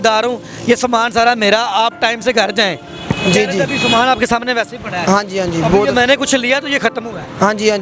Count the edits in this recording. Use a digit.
0